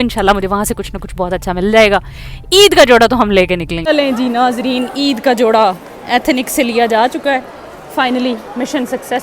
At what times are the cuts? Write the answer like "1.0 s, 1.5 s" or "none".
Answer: 3.7 s

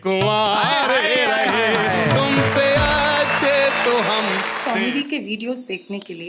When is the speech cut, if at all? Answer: 4.5 s

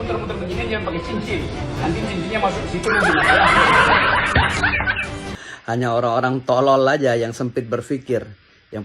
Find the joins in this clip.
5.3 s

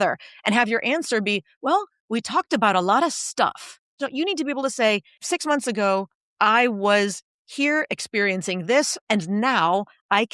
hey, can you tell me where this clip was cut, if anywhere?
4.0 s, 5.1 s, 9.0 s

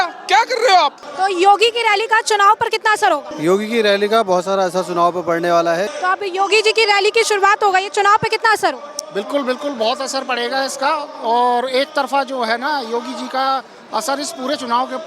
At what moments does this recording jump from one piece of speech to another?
1.0 s, 3.3 s, 5.9 s

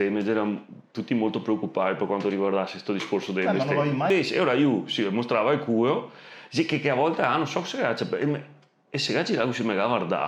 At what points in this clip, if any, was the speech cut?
4.1 s

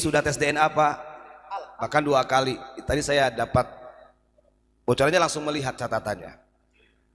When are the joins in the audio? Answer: none

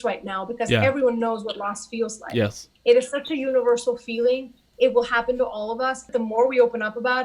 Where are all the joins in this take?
2.7 s, 6.0 s

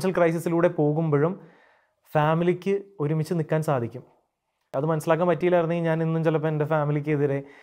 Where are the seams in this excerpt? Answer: 4.7 s

